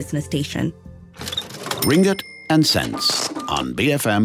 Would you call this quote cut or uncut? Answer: cut